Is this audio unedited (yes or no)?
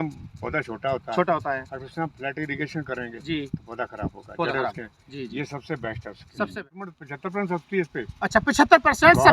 no